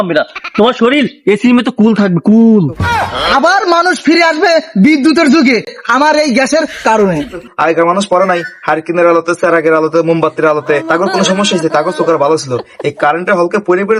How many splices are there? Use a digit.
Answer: 2